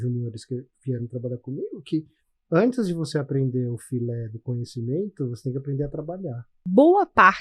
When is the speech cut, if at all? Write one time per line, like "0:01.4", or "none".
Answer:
0:06.5